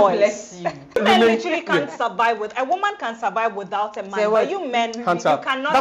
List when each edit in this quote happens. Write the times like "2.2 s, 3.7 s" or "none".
1.0 s